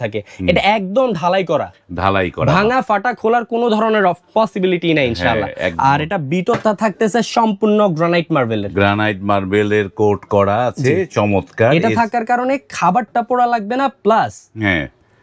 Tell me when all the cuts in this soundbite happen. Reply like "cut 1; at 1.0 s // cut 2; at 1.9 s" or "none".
none